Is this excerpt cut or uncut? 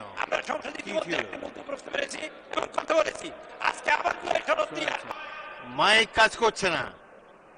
cut